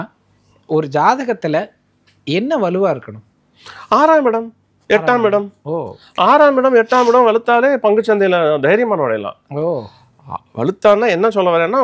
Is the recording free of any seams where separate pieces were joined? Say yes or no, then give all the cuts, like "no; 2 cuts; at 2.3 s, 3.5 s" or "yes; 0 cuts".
yes; 0 cuts